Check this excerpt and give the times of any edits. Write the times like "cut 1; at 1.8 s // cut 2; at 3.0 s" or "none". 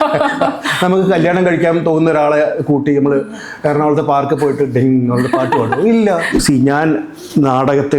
cut 1; at 6.4 s